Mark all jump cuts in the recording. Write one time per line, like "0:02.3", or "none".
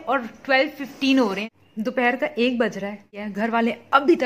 0:01.5
0:03.1